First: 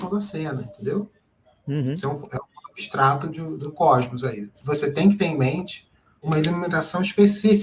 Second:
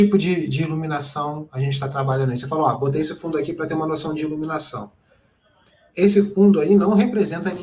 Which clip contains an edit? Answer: first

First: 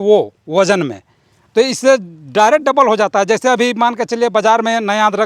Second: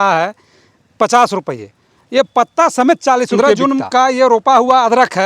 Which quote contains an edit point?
second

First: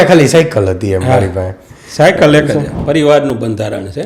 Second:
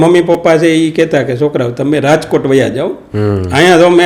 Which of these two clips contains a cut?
first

